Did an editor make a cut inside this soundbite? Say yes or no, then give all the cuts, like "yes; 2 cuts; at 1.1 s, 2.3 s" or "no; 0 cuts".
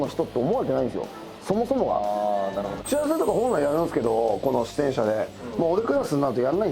yes; 1 cut; at 2.8 s